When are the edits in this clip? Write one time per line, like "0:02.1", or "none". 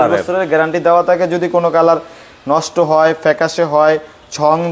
none